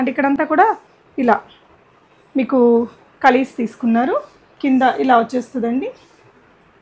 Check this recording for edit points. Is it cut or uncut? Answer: uncut